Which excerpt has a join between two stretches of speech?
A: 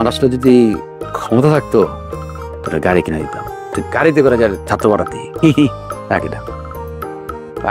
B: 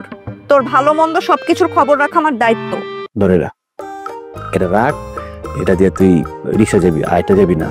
B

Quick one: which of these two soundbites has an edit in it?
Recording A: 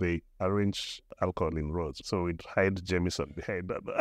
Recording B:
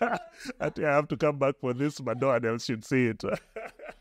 A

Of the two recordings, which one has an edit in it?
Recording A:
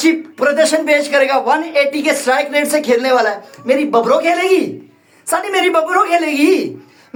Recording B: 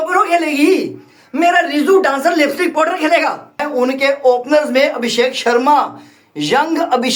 B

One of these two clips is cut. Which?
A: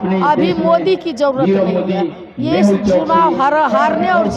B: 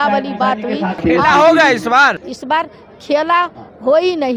B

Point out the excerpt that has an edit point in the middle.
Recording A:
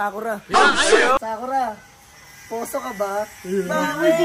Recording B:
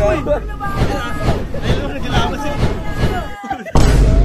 A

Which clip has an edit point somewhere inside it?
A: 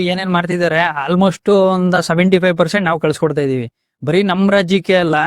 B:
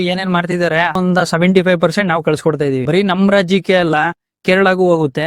B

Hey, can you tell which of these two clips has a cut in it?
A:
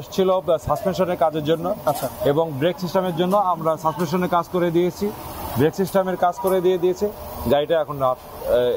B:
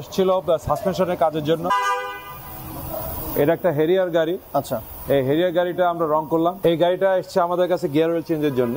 B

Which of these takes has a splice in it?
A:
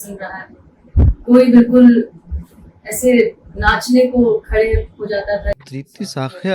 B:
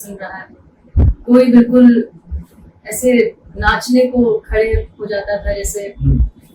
A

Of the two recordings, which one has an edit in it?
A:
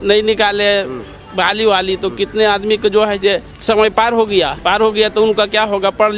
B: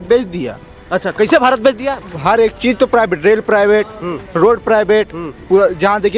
A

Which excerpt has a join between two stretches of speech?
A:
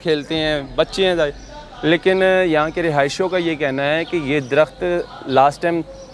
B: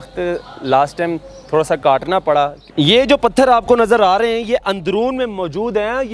B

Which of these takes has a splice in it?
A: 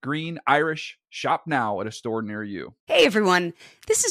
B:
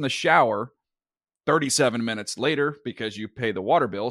A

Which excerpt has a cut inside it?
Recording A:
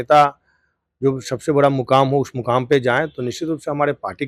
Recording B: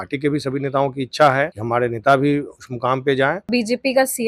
B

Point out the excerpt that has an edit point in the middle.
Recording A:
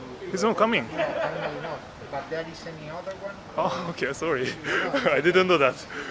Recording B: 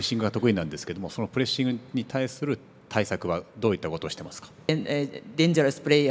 B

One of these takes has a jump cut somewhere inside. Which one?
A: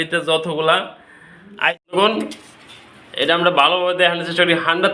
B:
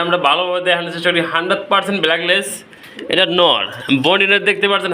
A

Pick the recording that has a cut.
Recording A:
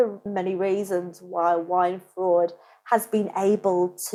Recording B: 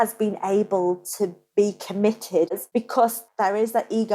B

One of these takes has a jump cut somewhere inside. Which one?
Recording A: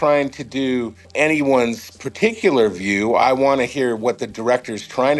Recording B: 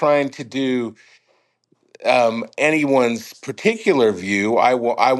A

